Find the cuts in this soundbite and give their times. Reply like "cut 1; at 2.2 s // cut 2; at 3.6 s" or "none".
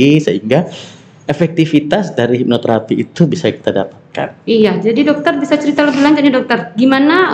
none